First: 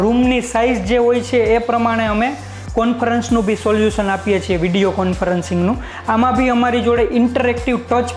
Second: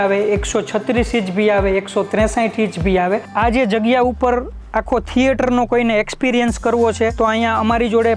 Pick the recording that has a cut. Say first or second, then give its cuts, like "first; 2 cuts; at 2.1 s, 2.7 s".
second; 2 cuts; at 3.3 s, 7.1 s